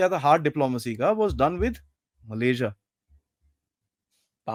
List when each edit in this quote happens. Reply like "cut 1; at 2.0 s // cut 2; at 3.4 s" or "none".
none